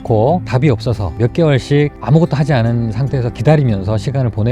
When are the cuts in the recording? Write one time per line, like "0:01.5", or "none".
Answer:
none